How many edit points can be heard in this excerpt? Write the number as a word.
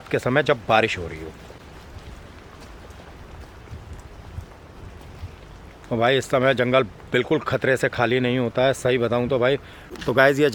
zero